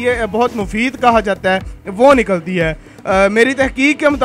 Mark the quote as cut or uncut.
uncut